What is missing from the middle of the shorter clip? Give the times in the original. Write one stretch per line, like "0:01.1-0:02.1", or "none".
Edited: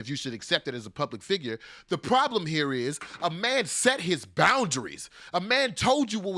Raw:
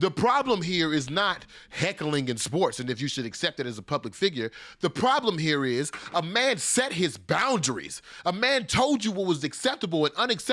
none